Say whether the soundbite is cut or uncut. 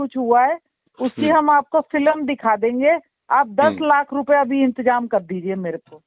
uncut